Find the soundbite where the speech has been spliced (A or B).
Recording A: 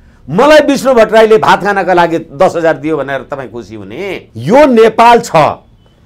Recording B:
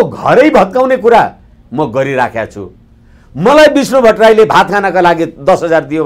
A